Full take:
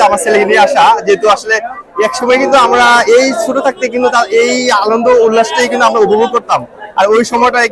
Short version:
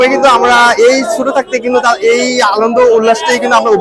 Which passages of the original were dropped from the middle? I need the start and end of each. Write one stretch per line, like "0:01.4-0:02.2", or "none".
none